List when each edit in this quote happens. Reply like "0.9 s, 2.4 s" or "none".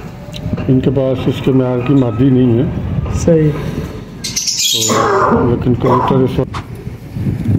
6.5 s